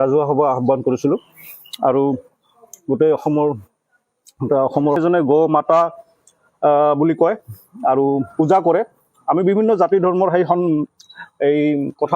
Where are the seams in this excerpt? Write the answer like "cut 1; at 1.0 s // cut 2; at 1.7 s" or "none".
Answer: cut 1; at 5.0 s